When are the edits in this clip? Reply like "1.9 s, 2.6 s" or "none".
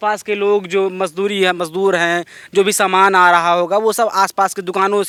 none